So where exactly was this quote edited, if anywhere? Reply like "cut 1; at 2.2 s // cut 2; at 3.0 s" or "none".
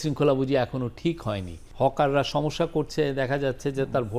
cut 1; at 1.6 s

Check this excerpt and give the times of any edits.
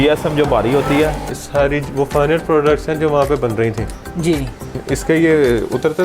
cut 1; at 1.4 s // cut 2; at 4.8 s

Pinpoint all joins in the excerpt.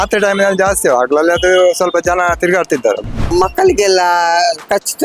cut 1; at 3.3 s

